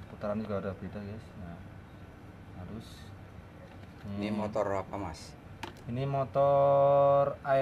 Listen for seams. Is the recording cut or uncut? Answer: uncut